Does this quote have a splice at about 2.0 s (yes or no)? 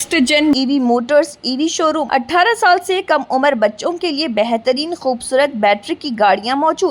yes